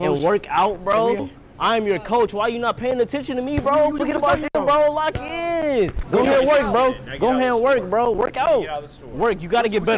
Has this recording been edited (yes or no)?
yes